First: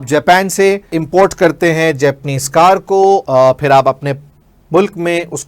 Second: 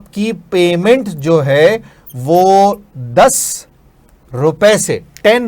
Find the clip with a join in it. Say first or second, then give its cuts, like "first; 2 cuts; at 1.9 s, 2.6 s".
first; 2 cuts; at 1.0 s, 3.2 s